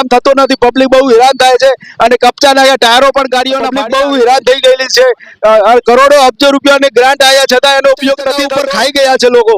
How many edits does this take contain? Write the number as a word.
two